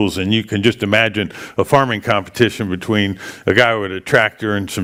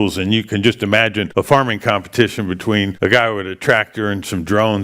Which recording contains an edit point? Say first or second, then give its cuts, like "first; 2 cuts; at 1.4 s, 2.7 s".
second; 2 cuts; at 1.2 s, 2.9 s